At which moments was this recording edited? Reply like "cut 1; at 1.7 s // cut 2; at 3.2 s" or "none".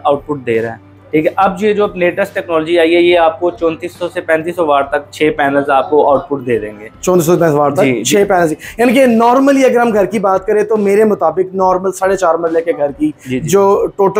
none

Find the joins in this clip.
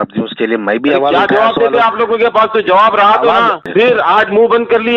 cut 1; at 3.6 s

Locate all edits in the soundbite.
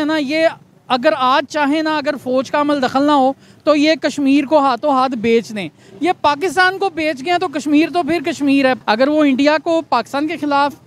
cut 1; at 8.8 s

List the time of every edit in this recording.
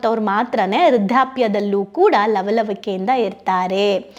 none

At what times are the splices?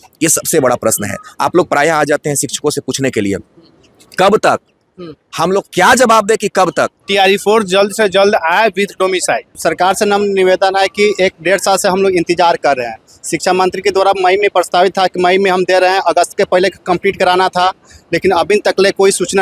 cut 1; at 7.0 s // cut 2; at 9.5 s

